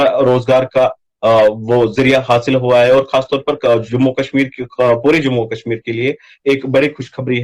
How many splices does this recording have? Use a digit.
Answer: 0